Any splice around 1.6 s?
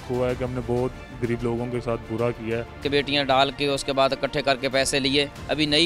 no; 1 cut; at 2.8 s

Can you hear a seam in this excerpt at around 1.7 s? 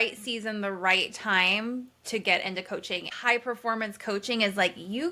no; 1 cut; at 3.1 s

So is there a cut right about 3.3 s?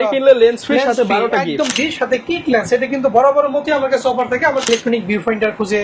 no; 2 cuts; at 1.7 s, 4.7 s

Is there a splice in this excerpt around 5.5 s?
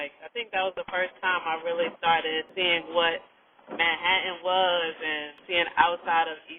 yes; 2 cuts; at 2.5 s, 5.5 s

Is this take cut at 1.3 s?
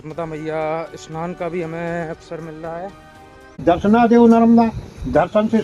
no; 1 cut; at 3.6 s

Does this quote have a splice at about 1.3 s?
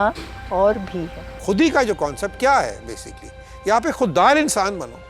yes; 1 cut; at 1.3 s

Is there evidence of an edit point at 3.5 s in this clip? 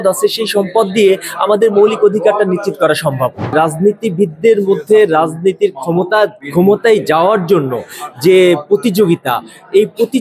yes; 2 cuts; at 3.5 s, 6.4 s

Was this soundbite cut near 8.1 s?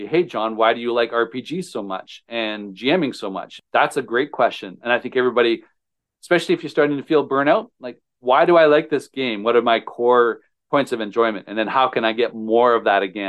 no; 2 cuts; at 3.5 s, 10.5 s

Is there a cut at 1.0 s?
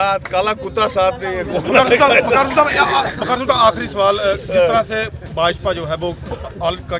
no; 0 cuts

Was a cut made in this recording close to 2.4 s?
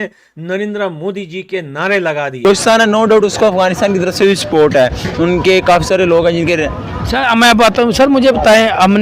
yes; 1 cut; at 2.4 s

